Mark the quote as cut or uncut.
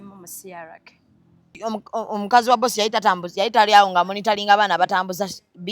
cut